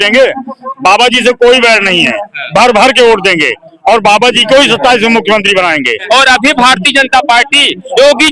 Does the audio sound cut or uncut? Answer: cut